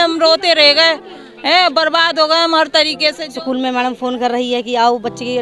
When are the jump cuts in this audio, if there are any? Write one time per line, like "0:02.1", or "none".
0:03.2